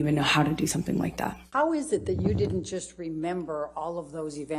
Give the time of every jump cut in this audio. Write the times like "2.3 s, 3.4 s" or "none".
1.4 s